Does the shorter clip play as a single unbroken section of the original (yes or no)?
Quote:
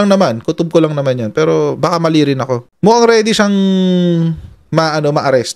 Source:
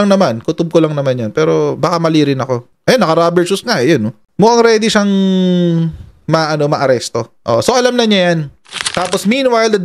no